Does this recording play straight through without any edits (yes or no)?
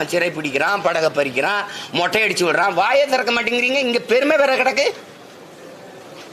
yes